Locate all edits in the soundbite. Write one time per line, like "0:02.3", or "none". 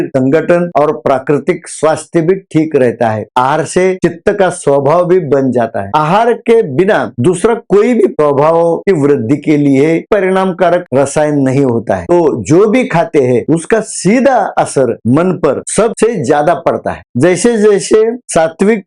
0:03.2
0:05.9
0:12.0
0:17.0